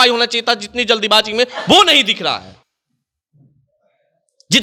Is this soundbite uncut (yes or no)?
yes